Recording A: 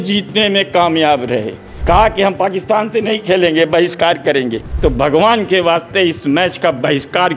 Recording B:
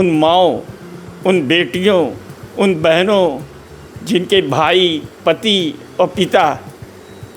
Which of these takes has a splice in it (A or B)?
A